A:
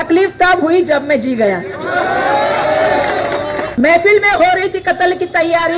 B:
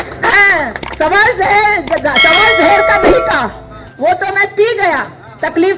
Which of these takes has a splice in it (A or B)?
A